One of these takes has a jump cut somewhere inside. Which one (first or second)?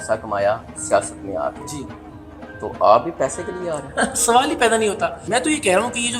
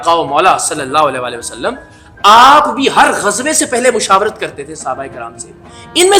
first